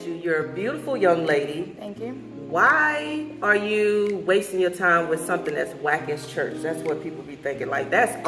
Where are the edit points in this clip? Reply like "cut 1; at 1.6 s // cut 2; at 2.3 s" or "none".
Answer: none